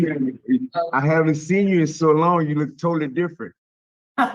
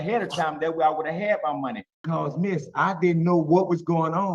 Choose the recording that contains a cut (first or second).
second